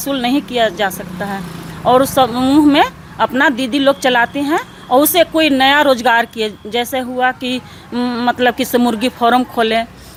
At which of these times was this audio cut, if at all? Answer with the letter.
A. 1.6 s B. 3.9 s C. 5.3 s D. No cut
D